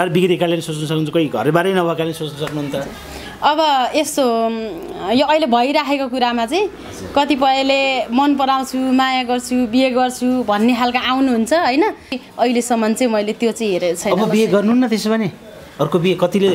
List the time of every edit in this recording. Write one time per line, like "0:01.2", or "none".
0:12.2